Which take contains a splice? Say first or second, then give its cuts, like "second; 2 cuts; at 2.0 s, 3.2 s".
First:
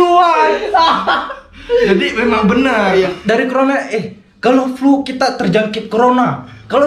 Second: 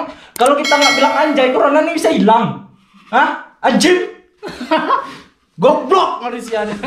first; 1 cut; at 3.1 s